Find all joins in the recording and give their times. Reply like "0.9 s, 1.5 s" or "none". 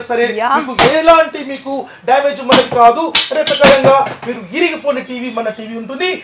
none